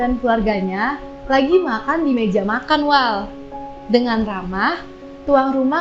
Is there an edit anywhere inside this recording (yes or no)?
no